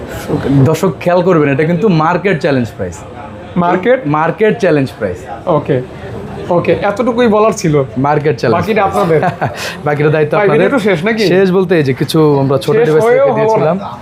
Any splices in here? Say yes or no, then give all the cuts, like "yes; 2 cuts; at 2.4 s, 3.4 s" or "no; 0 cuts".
no; 0 cuts